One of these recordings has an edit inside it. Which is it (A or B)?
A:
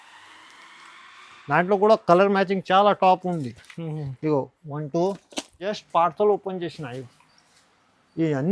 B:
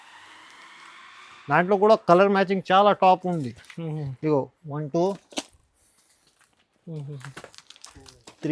A